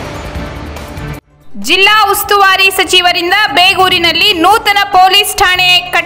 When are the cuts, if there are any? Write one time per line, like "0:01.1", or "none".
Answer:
0:01.0